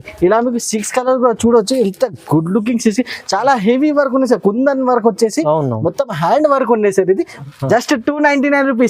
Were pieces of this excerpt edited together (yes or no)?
yes